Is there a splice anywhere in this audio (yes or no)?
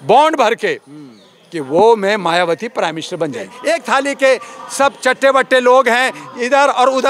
yes